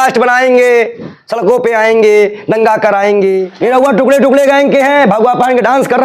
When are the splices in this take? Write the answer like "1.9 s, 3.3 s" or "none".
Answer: 3.5 s